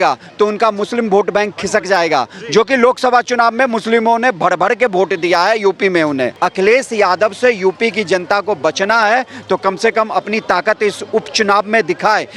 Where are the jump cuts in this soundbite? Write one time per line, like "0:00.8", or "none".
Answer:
0:06.3